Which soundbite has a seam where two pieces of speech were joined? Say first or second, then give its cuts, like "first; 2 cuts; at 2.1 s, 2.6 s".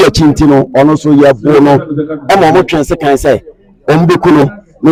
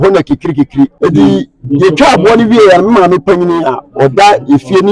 second; 1 cut; at 0.9 s